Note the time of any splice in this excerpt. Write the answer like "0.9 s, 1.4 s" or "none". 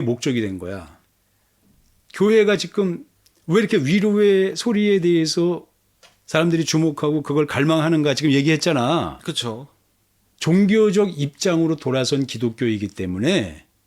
1.6 s